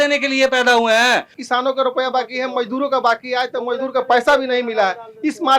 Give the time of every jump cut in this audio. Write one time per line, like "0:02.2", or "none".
0:01.4